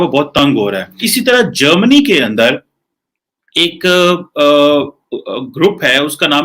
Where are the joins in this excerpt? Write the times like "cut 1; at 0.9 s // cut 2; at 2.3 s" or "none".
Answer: cut 1; at 0.9 s